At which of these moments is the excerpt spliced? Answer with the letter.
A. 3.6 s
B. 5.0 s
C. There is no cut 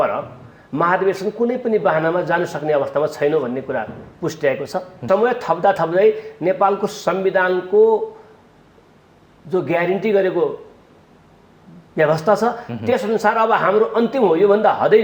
B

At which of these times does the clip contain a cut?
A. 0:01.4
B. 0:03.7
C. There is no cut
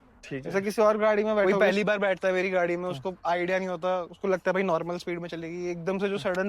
A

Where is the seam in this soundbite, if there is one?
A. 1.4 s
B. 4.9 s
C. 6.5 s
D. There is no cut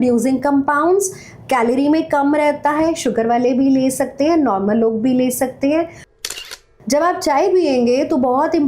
C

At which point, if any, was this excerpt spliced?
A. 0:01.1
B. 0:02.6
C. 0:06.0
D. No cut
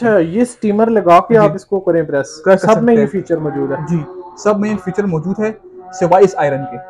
D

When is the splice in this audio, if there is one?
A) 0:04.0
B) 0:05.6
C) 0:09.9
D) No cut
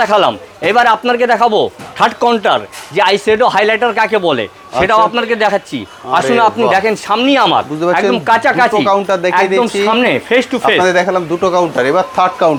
D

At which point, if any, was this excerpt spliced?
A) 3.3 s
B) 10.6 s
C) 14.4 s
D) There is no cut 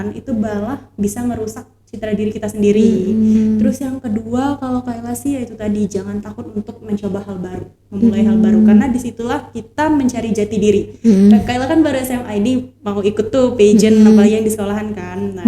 A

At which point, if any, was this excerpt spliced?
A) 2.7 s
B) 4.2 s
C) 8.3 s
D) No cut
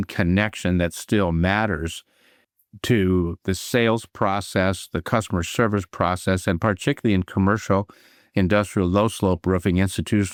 D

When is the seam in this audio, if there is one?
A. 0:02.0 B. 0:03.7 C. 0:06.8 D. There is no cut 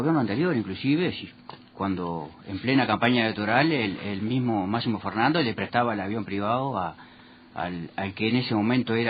A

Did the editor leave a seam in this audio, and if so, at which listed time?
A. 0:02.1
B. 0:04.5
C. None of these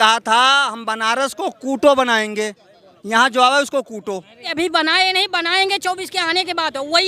B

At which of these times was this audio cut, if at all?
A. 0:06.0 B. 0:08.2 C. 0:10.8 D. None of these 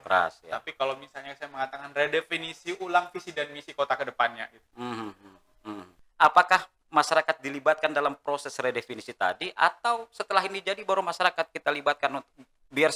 A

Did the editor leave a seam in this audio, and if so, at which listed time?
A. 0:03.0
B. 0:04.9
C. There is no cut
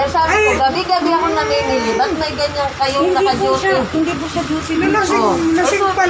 C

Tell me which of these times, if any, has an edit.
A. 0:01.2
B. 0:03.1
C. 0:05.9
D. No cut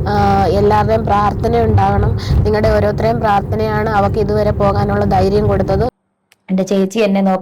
C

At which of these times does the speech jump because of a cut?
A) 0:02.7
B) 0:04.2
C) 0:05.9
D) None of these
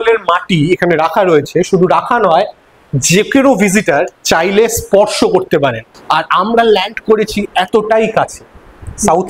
C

